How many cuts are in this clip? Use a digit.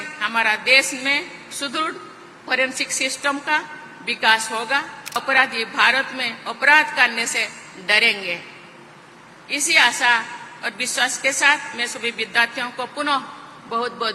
1